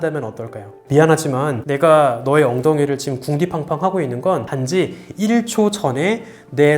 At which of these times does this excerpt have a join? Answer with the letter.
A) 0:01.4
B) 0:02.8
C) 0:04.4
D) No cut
C